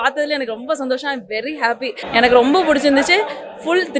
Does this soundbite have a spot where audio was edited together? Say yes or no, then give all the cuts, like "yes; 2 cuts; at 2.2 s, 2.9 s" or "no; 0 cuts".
yes; 1 cut; at 1.9 s